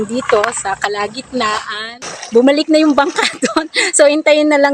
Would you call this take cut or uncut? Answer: cut